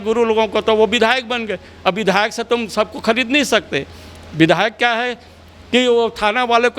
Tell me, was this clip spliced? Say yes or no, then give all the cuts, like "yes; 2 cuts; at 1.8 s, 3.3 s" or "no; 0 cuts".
no; 0 cuts